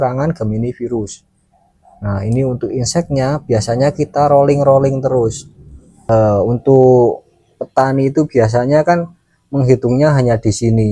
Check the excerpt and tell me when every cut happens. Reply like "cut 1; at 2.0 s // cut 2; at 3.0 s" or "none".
cut 1; at 5.9 s